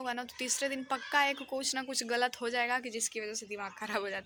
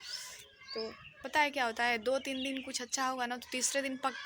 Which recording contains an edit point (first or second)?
second